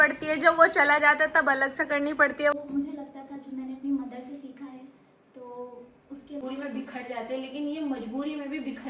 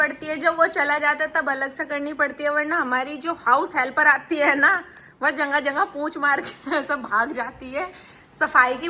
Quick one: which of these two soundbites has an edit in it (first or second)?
first